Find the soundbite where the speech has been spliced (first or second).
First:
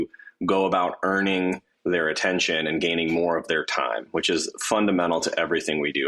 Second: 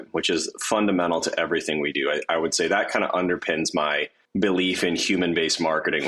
second